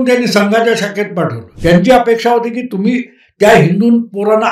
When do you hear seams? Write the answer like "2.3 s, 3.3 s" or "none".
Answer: 1.4 s